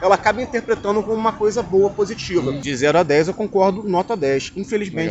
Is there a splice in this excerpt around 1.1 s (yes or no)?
no